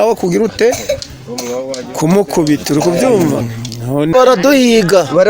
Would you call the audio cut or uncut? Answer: cut